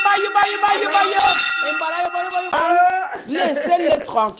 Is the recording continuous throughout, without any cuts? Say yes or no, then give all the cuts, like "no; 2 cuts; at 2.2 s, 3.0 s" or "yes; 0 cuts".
no; 1 cut; at 2.5 s